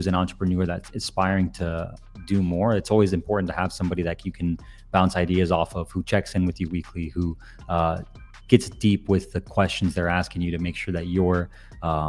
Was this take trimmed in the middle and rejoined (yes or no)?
no